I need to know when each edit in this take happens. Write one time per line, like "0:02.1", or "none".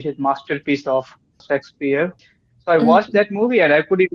0:01.4
0:02.2